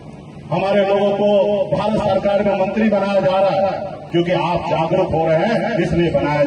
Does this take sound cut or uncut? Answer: cut